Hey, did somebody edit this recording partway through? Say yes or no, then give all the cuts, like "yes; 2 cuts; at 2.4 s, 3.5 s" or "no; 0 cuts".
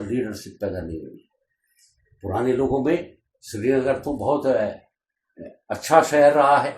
no; 0 cuts